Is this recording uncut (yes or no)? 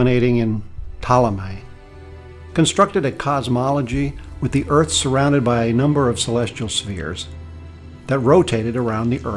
no